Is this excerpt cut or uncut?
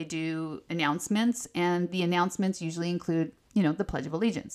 uncut